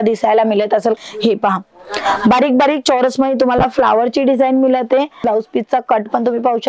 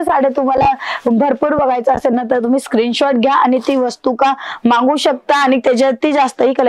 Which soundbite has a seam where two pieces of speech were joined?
first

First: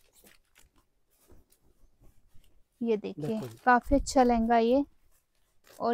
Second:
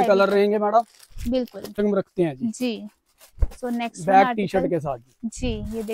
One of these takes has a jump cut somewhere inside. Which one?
second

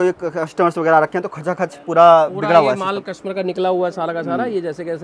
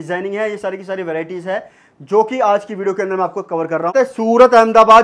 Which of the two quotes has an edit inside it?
second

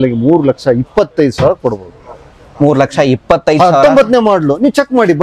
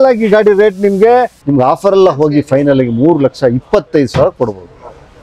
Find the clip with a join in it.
second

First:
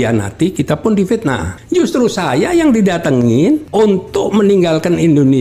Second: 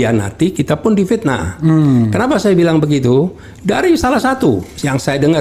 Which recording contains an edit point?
first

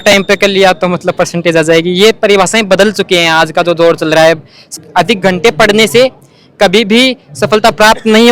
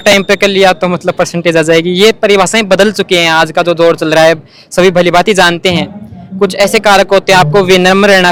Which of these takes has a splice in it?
first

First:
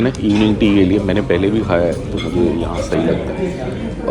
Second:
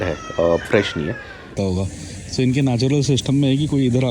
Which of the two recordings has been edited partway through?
second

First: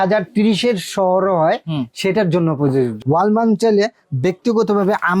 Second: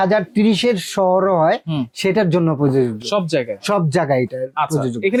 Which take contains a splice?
first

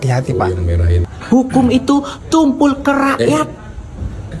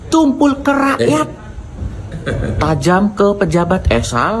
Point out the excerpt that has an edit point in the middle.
first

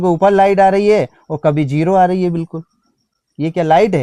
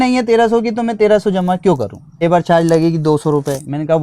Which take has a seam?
second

